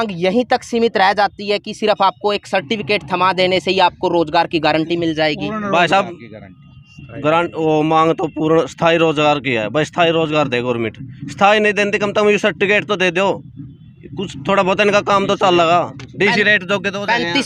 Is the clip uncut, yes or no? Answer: yes